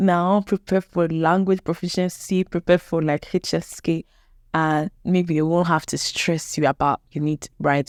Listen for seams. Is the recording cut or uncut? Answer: uncut